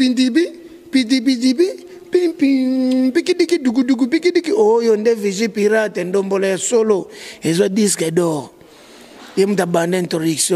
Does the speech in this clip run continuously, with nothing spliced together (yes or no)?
yes